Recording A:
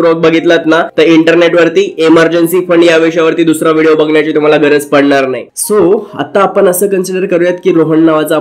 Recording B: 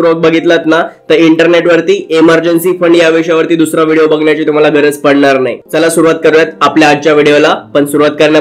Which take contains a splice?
A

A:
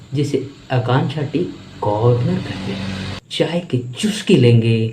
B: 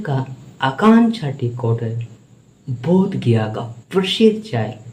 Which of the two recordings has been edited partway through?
A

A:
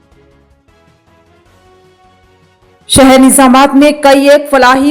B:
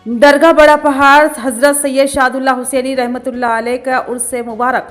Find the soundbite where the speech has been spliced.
A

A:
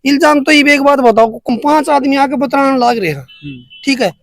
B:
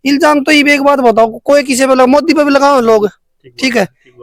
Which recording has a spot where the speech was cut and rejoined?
A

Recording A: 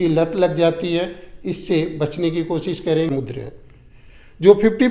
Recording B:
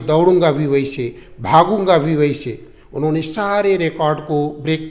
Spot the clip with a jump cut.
A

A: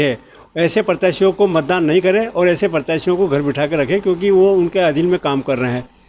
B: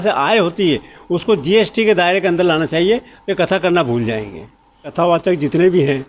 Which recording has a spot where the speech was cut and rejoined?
B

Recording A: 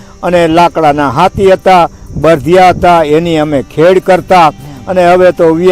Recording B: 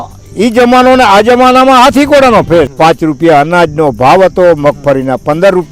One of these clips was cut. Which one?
B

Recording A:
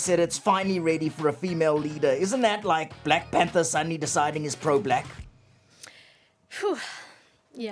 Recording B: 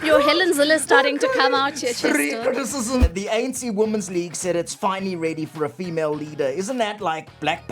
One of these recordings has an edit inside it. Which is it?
B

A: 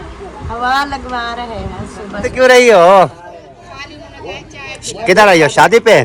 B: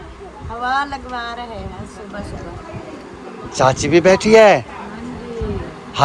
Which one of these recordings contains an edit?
A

